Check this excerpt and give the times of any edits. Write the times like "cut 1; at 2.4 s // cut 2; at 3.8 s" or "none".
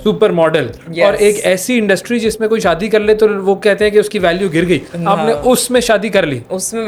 none